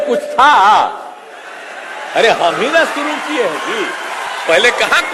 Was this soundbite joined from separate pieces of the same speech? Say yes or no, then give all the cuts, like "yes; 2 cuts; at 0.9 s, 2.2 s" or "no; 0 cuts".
no; 0 cuts